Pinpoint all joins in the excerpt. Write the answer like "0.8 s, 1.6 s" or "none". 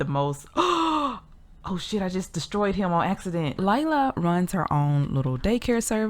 3.5 s